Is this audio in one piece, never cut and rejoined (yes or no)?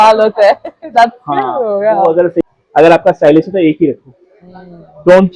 no